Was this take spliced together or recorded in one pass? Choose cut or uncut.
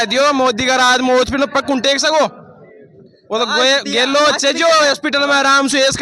uncut